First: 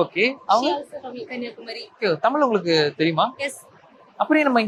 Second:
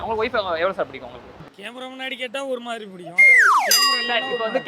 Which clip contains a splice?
second; 1 cut; at 1.6 s

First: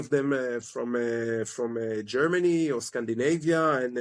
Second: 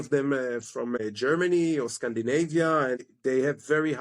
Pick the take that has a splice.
second; 2 cuts; at 1.0 s, 3.0 s

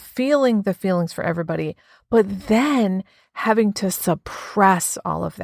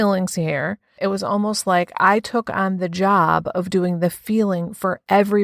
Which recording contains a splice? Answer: second; 1 cut; at 0.9 s

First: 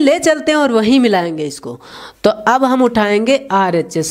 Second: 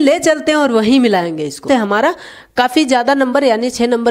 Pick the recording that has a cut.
second; 1 cut; at 1.6 s

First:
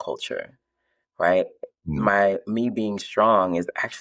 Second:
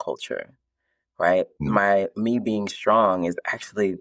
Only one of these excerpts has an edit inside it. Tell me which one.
second; 1 cut; at 1.6 s

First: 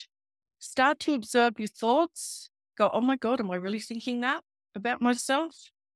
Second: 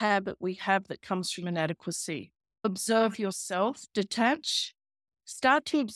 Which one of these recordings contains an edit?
second; 1 cut; at 2.7 s

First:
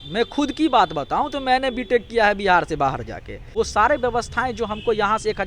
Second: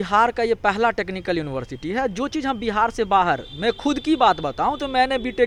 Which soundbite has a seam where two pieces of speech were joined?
first; 1 cut; at 3.4 s

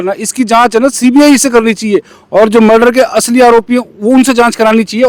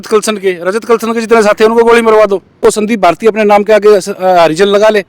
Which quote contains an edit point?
second; 1 cut; at 2.6 s

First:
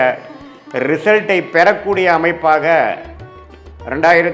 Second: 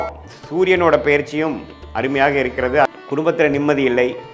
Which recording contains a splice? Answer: second; 1 cut; at 2.9 s

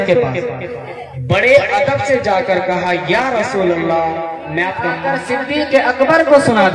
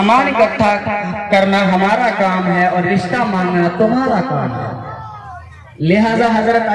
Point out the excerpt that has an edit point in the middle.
first; 1 cut; at 4.9 s

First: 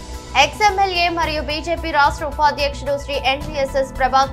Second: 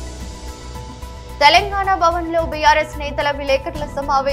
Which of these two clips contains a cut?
second; 1 cut; at 0.9 s

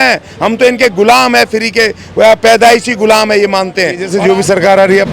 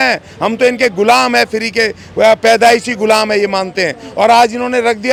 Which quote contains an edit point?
first; 1 cut; at 4.1 s

